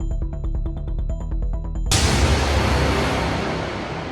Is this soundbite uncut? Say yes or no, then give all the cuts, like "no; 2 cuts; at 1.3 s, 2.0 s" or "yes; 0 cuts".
no; 1 cut; at 1.8 s